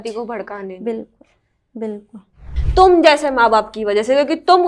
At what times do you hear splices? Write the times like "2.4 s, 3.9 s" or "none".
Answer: 2.6 s